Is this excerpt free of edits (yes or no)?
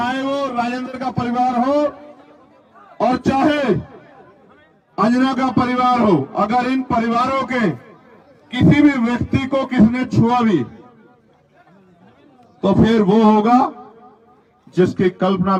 yes